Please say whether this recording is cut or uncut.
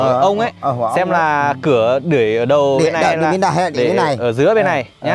uncut